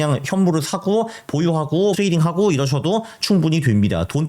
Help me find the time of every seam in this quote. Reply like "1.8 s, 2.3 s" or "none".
2.0 s

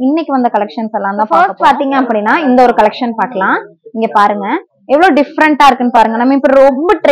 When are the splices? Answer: 1.3 s

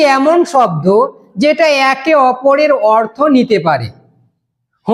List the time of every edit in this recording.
none

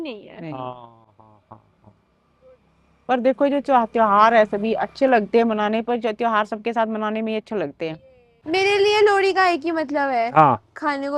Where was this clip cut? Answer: none

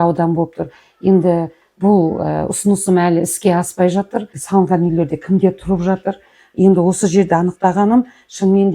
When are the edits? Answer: 4.4 s

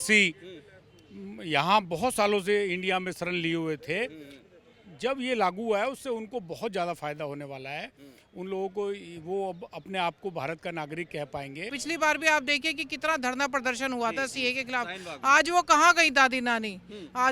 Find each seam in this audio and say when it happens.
11.8 s

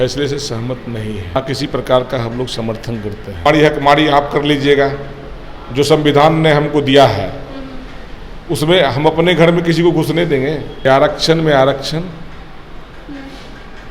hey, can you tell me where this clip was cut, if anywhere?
1.4 s, 3.4 s, 10.7 s

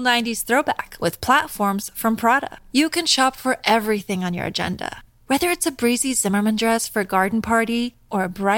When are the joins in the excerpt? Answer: none

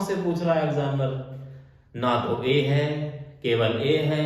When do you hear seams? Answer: none

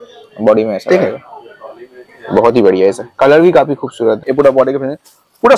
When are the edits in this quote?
4.2 s

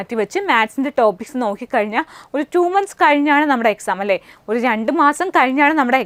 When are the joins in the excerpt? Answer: none

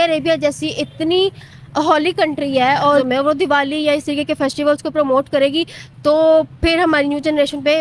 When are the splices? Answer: 3.0 s

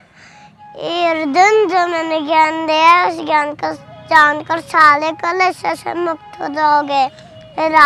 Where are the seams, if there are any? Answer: none

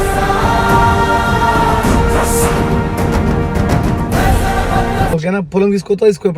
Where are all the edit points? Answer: 5.1 s

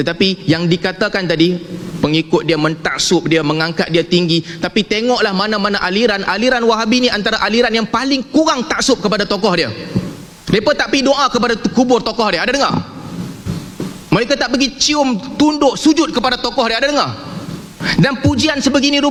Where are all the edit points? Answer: none

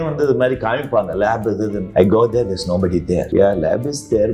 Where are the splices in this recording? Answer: 1.8 s, 3.3 s

